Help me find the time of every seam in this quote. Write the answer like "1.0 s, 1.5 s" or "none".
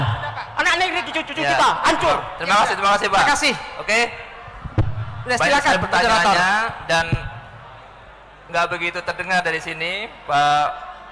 none